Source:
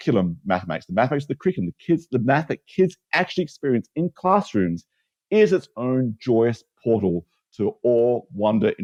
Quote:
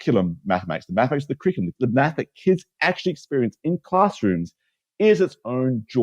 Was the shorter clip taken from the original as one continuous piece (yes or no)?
no